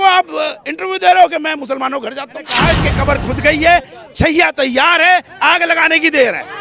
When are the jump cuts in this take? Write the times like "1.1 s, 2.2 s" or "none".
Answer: 2.5 s